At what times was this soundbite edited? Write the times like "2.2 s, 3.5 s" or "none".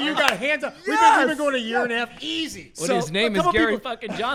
none